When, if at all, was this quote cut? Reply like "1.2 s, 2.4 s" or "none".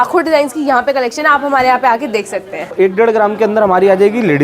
2.7 s